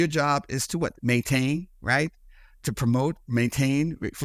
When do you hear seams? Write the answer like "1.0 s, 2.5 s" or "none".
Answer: none